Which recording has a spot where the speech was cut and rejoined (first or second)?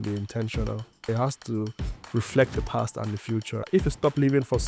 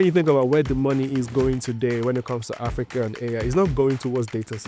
first